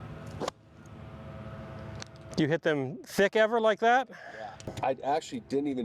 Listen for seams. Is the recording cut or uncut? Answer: cut